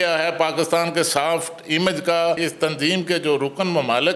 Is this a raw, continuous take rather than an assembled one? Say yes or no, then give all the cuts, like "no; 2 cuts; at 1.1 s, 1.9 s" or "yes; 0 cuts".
no; 1 cut; at 2.4 s